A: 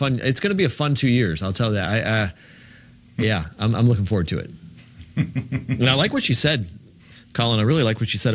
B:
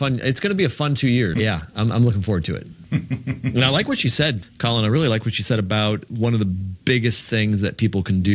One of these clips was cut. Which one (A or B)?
B